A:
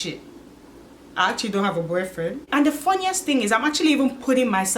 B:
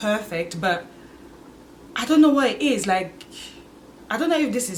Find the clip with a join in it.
A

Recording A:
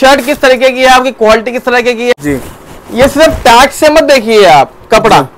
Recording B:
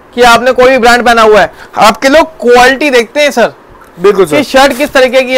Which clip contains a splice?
A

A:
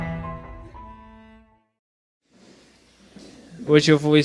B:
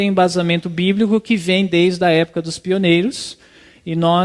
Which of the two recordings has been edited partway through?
B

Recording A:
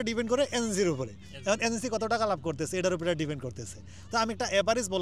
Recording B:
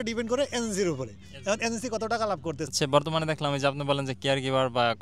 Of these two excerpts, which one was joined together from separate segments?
B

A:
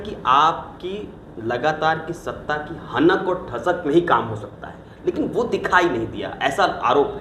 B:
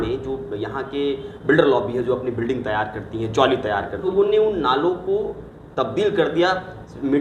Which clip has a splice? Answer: B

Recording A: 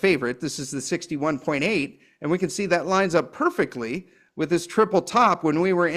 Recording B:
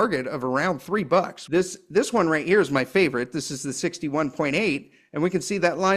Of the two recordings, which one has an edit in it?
B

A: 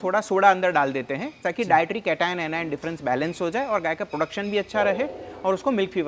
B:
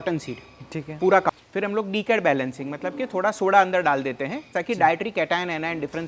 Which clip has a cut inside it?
B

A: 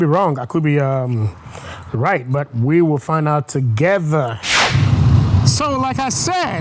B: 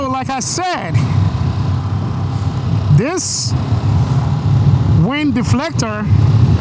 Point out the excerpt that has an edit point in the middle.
A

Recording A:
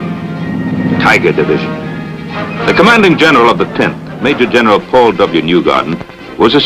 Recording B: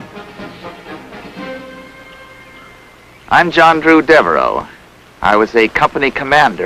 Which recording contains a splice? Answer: A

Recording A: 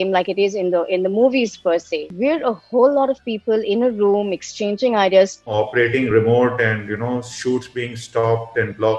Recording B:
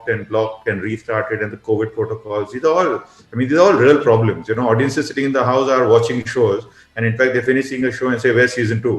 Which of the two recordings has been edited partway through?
A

